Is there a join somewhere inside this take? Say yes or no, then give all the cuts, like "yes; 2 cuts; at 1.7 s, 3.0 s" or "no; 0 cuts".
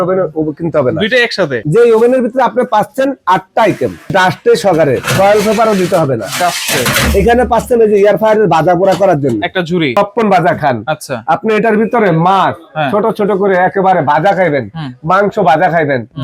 yes; 3 cuts; at 1.6 s, 4.1 s, 9.9 s